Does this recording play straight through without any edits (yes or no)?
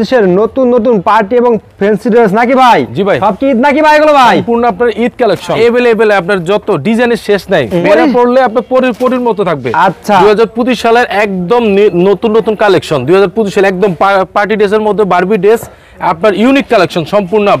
no